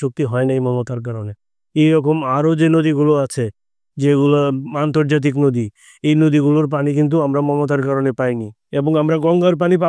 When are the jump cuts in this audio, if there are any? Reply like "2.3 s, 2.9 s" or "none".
none